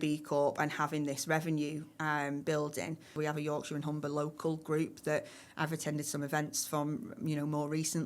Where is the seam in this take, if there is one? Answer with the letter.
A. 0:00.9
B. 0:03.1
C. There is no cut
B